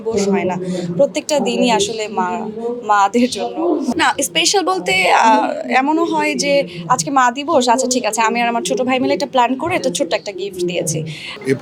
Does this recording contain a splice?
no; 0 cuts

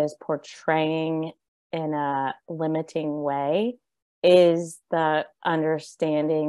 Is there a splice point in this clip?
no; 0 cuts

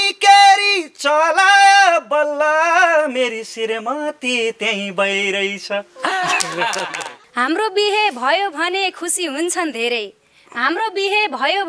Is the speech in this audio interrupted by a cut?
yes; 1 cut; at 7.2 s

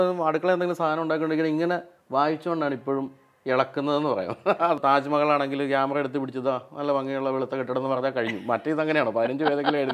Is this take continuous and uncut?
no; 1 cut; at 4.8 s

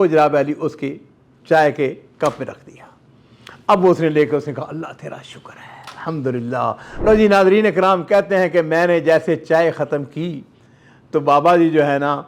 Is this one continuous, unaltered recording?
no; 1 cut; at 6.9 s

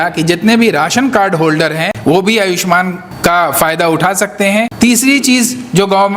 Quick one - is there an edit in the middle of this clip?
yes; 3 cuts; at 1.9 s, 3.0 s, 4.7 s

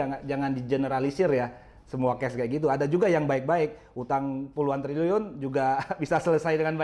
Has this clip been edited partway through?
no; 0 cuts

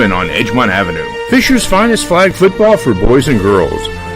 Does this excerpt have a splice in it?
yes; 1 cut; at 1.1 s

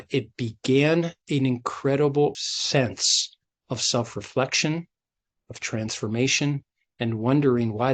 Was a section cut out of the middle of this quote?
yes; 1 cut; at 2.4 s

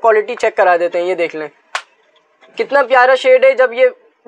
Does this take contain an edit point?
no; 0 cuts

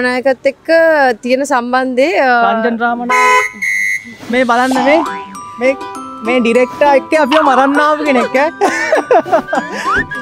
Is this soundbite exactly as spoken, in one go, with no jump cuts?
yes; 0 cuts

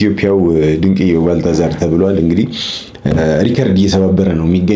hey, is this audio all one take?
yes; 0 cuts

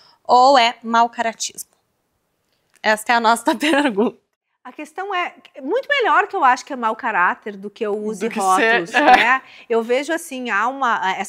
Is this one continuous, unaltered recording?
yes; 0 cuts

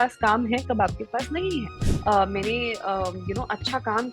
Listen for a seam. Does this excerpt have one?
yes; 1 cut; at 1.8 s

